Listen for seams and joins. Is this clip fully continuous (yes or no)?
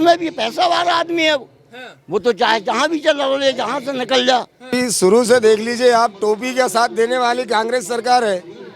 no